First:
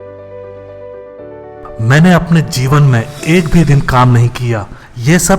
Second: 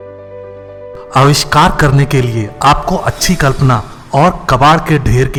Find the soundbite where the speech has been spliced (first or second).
first